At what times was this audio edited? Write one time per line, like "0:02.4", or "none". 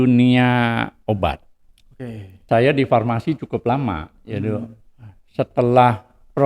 0:02.4

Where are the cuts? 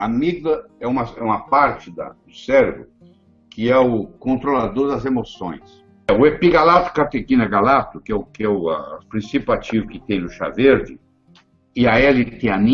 0:05.9

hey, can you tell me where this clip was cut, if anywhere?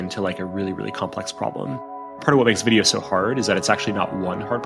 0:02.2

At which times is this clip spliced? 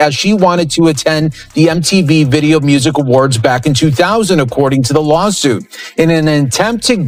none

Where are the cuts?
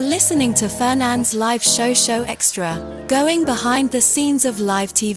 none

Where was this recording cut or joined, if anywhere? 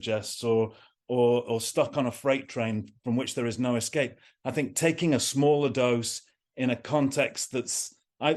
none

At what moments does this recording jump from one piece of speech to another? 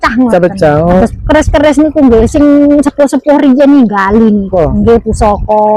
0:01.0
0:04.5

